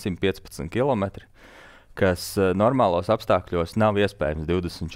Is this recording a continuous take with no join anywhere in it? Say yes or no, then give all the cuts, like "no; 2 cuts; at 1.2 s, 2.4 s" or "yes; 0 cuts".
yes; 0 cuts